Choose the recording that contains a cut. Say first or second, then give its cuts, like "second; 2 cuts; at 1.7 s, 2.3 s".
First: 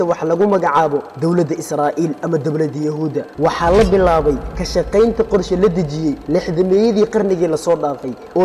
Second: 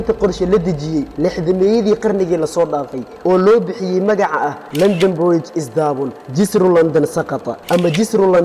first; 1 cut; at 3.3 s